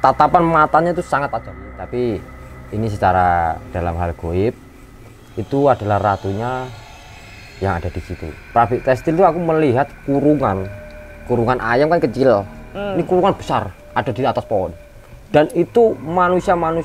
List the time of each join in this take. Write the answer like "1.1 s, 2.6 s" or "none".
1.7 s, 8.4 s